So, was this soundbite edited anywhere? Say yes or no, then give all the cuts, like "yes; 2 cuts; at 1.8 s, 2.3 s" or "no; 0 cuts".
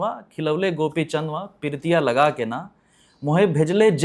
no; 0 cuts